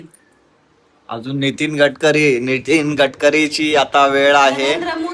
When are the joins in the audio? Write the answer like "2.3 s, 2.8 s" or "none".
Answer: none